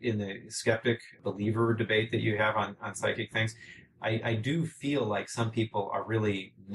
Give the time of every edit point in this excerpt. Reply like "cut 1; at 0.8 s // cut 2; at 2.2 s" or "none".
cut 1; at 1.2 s